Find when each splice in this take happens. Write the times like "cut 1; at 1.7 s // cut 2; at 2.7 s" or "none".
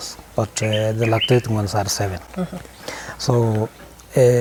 none